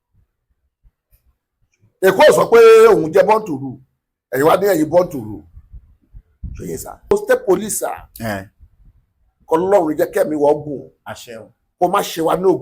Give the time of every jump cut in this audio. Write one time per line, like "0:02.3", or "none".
0:07.1